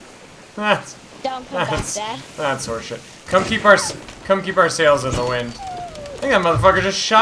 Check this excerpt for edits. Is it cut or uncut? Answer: uncut